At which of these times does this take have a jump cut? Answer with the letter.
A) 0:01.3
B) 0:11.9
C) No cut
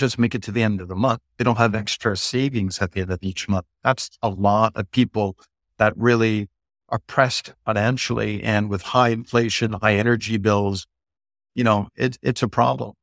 A